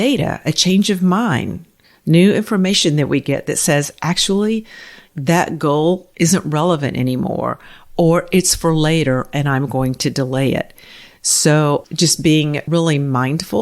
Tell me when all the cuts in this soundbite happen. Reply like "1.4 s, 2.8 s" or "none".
12.6 s